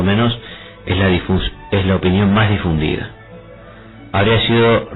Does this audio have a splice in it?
no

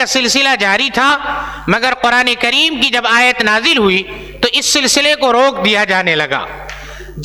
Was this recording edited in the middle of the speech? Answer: no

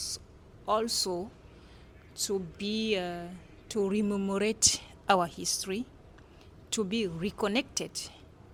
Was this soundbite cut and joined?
no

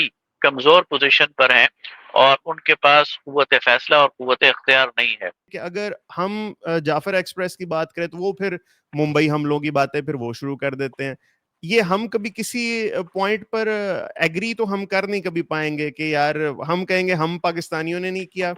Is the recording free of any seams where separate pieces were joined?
no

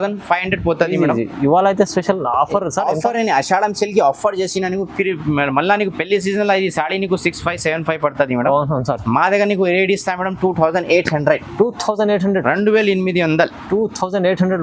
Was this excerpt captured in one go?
yes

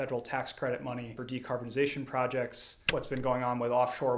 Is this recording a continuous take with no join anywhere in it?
no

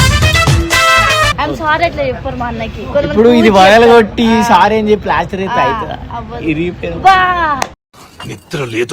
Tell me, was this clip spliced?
yes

